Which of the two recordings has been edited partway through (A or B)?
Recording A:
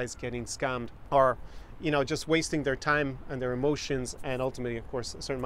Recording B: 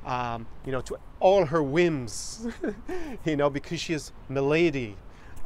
A